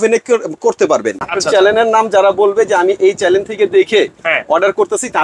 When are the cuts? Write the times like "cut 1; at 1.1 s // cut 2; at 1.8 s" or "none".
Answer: cut 1; at 1.3 s